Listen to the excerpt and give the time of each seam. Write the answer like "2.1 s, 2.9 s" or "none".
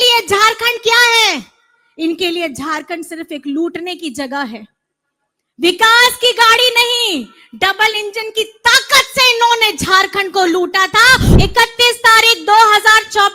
11.3 s